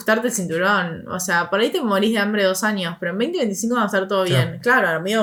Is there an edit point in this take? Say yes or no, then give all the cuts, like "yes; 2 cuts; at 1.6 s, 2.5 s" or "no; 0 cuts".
no; 0 cuts